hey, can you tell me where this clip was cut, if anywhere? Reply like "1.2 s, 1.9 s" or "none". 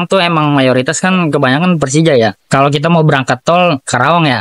2.4 s